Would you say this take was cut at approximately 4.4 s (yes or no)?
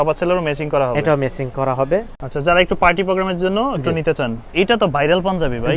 yes